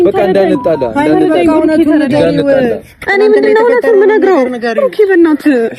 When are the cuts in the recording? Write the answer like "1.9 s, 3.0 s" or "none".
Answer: none